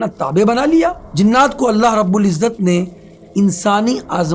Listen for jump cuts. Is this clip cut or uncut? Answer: cut